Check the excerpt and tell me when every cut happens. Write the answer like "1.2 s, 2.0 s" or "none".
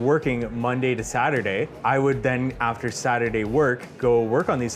1.8 s